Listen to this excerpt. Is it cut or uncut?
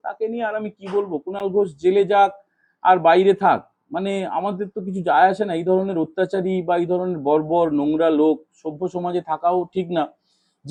uncut